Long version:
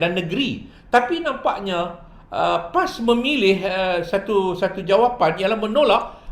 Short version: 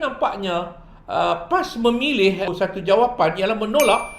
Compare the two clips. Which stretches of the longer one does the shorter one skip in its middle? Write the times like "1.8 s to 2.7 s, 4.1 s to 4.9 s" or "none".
3.7 s to 4.5 s